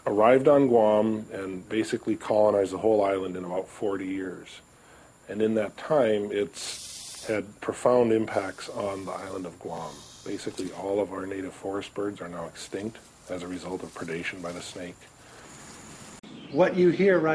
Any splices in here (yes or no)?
yes